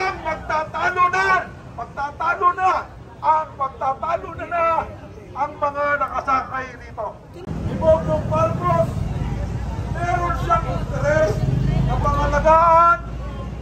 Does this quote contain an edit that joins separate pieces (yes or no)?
yes